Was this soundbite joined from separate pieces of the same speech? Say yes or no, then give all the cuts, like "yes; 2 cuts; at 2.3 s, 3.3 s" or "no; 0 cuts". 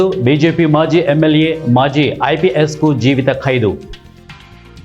yes; 1 cut; at 3.9 s